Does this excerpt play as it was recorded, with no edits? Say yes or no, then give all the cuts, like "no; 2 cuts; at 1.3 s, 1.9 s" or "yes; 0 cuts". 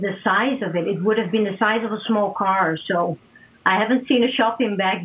yes; 0 cuts